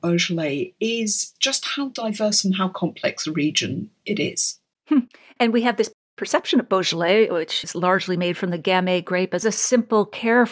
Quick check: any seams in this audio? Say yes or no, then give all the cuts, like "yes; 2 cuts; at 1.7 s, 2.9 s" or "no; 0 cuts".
yes; 1 cut; at 9.4 s